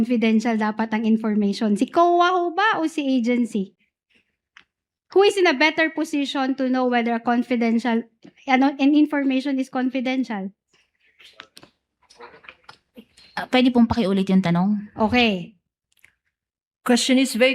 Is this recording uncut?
yes; 0 cuts

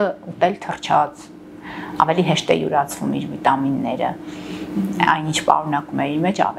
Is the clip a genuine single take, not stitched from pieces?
yes; 0 cuts

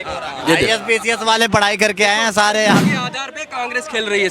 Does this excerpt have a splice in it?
yes; 1 cut; at 2.9 s

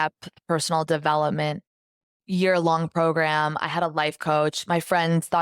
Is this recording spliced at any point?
no; 0 cuts

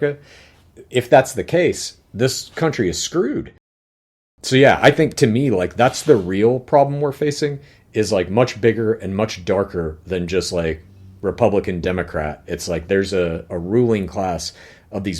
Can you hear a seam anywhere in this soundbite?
yes; 1 cut; at 3.9 s

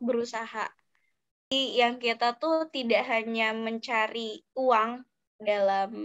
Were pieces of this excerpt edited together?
yes; 1 cut; at 1.5 s

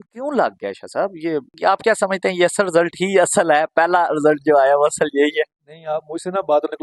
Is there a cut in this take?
no; 0 cuts

